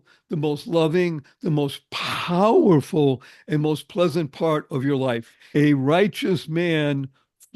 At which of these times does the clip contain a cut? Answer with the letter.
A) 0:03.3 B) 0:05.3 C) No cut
B